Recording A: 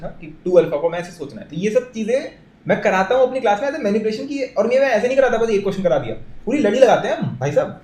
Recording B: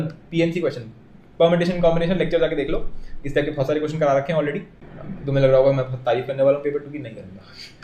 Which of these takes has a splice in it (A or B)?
B